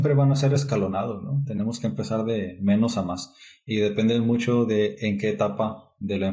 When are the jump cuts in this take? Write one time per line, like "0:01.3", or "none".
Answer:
none